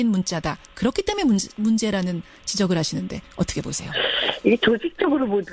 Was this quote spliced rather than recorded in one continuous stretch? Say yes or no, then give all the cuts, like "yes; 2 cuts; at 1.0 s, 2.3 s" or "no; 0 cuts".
yes; 1 cut; at 1.6 s